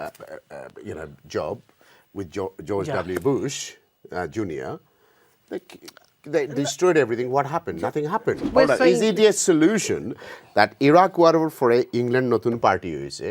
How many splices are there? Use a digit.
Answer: 1